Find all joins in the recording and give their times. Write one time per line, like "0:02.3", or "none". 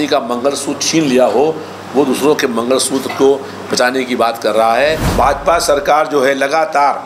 0:05.0